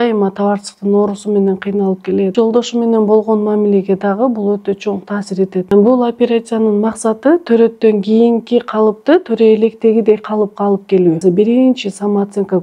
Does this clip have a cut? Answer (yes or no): yes